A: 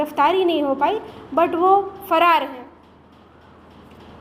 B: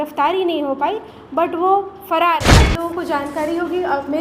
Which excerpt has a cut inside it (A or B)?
B